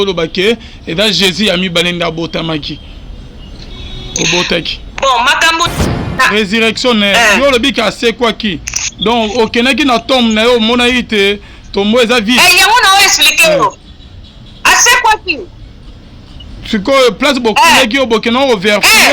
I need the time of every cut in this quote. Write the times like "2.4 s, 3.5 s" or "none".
6.1 s